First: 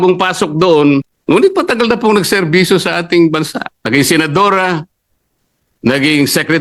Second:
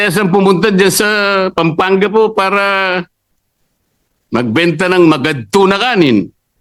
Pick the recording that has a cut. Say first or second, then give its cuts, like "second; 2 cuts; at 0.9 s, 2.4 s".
first; 1 cut; at 1.1 s